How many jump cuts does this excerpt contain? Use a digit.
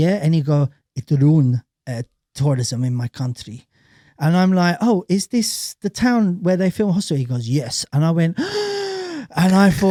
0